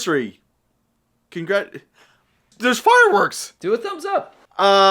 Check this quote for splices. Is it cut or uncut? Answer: cut